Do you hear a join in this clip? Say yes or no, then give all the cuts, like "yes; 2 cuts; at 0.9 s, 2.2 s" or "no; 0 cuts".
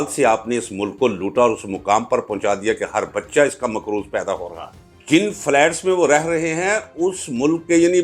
yes; 1 cut; at 4.9 s